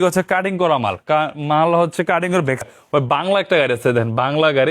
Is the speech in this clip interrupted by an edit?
yes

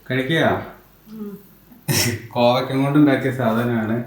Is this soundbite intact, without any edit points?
no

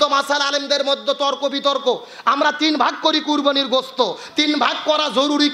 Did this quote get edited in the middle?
no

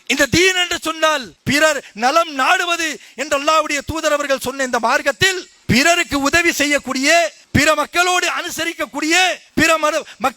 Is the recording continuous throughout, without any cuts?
no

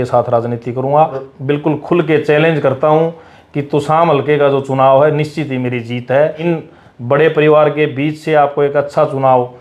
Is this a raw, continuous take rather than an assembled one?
no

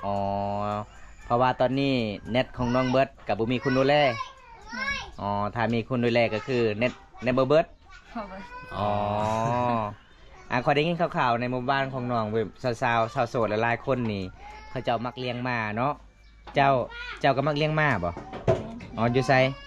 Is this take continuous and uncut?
yes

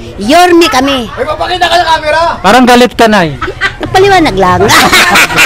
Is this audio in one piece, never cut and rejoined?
yes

